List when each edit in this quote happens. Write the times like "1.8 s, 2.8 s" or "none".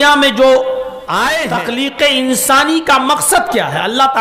1.4 s